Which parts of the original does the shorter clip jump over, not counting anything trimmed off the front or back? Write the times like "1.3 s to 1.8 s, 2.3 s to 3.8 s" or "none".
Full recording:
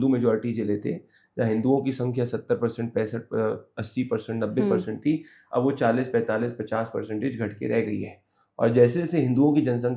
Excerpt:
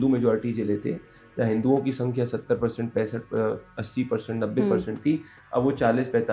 none